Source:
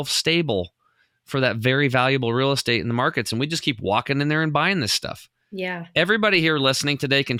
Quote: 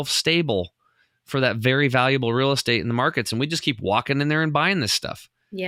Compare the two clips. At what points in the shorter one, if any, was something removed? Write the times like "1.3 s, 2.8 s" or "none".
none